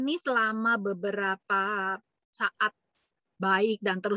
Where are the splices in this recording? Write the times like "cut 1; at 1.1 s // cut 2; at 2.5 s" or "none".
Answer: none